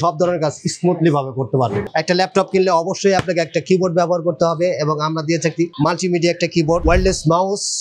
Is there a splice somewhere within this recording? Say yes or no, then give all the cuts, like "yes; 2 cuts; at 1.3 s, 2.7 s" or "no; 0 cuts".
yes; 3 cuts; at 1.8 s, 5.7 s, 6.8 s